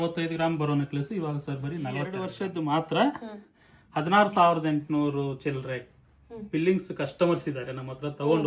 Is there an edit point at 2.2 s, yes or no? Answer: yes